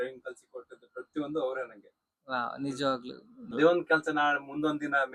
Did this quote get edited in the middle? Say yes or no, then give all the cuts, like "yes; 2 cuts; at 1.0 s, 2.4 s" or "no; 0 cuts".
yes; 1 cut; at 3.5 s